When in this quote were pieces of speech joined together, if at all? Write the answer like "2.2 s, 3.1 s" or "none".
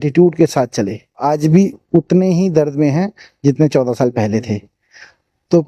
1.2 s